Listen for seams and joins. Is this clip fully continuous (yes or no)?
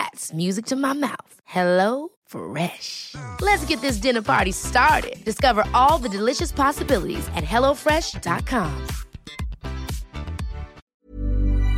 no